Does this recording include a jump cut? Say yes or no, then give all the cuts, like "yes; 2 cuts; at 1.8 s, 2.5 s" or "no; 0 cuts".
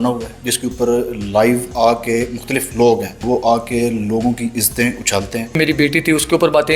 yes; 2 cuts; at 3.2 s, 5.6 s